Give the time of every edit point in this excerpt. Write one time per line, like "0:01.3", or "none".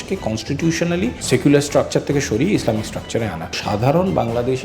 0:01.2
0:03.6